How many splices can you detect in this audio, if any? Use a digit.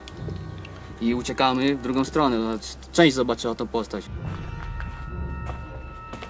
1